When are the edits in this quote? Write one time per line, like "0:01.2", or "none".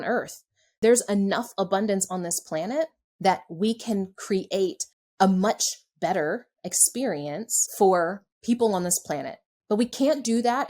0:07.6
0:08.3

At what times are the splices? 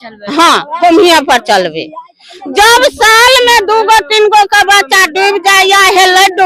none

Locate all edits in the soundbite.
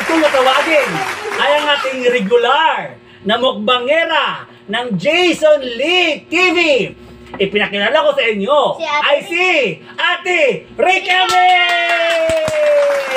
none

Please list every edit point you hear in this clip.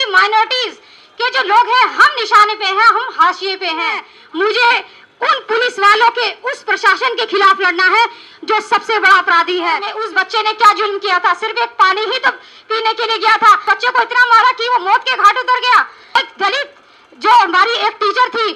0:04.1
0:10.0
0:13.6
0:16.2

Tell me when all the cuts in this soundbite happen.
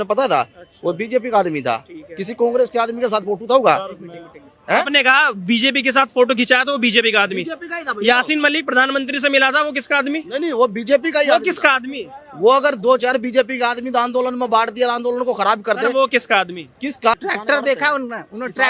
0:17.1

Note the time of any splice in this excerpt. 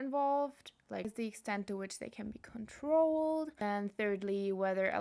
0:01.0
0:03.6

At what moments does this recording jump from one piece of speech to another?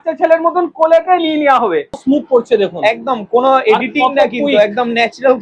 0:02.0

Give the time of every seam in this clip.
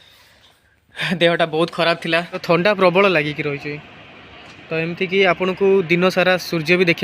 0:02.4

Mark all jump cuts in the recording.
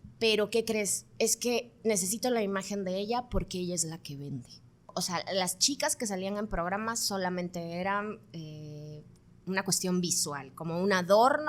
0:04.9

